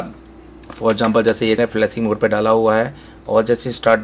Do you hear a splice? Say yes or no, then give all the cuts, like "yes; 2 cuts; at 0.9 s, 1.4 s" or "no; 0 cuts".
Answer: yes; 1 cut; at 1.6 s